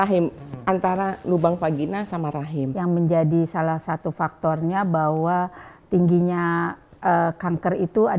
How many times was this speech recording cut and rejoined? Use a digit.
1